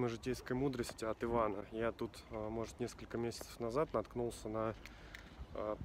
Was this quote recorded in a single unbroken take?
yes; 0 cuts

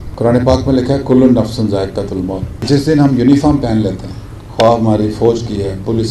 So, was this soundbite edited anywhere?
yes; 1 cut; at 2.5 s

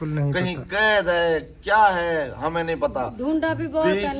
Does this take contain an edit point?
no; 0 cuts

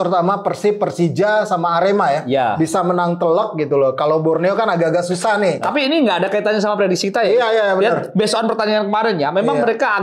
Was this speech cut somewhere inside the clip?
yes; 1 cut; at 5.6 s

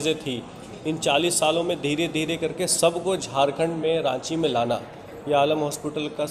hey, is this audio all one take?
yes; 0 cuts

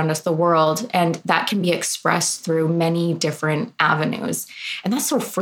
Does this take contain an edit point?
no; 0 cuts

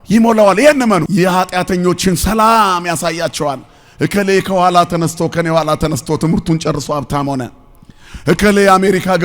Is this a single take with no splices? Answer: no; 1 cut; at 1.1 s

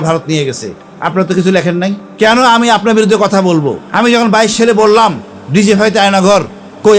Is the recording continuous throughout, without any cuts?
no; 2 cuts; at 2.0 s, 3.8 s

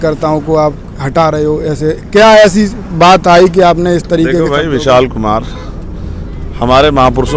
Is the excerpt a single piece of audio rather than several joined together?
yes; 0 cuts

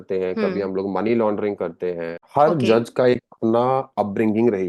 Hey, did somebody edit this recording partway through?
yes; 1 cut; at 2.1 s

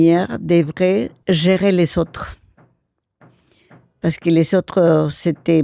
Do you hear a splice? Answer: yes; 1 cut; at 1.1 s

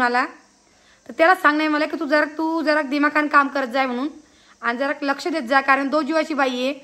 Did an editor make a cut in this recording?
no; 0 cuts

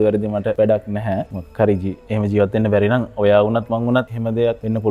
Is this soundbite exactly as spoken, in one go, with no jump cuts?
yes; 0 cuts

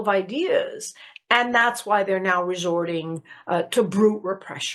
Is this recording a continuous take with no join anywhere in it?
yes; 0 cuts

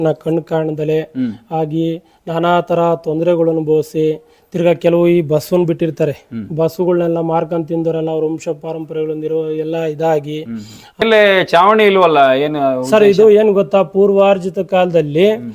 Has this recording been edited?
yes; 1 cut; at 11.0 s

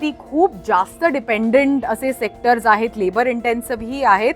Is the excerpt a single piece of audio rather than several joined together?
yes; 0 cuts

